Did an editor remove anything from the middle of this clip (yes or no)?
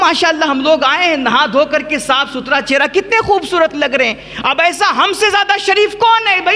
no